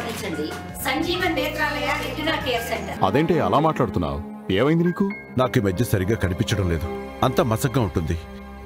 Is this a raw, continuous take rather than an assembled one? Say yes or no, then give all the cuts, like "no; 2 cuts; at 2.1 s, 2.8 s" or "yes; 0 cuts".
no; 1 cut; at 2.9 s